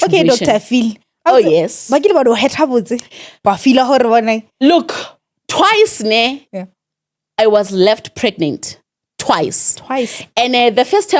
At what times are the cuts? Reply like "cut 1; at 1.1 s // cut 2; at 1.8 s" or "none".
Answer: none